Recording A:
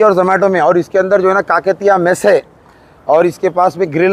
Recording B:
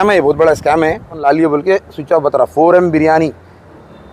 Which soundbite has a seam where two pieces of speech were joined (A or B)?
B